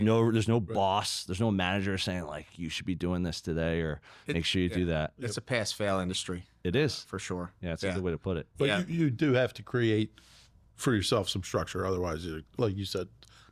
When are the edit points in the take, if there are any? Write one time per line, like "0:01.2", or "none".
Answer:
none